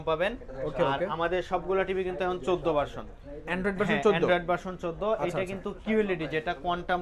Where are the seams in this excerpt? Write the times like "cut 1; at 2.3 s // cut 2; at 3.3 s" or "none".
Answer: none